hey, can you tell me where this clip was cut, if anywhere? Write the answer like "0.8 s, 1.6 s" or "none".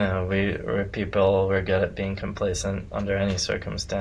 none